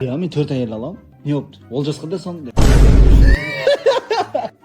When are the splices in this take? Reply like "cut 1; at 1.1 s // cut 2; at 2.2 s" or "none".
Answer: cut 1; at 1.1 s // cut 2; at 2.5 s